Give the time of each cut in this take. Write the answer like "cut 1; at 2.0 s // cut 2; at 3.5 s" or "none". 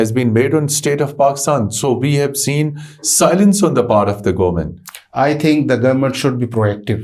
none